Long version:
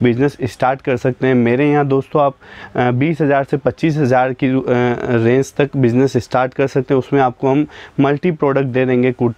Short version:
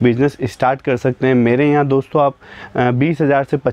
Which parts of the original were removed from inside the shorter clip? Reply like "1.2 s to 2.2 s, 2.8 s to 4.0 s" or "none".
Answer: none